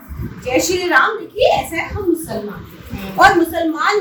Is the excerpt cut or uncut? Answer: uncut